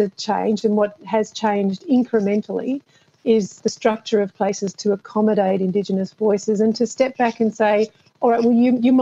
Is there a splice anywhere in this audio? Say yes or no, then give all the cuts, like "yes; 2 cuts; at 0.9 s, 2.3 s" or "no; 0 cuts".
no; 0 cuts